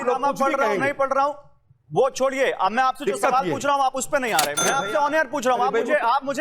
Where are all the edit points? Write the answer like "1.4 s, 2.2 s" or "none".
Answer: 4.6 s